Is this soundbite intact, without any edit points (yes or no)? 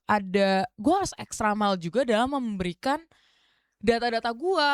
yes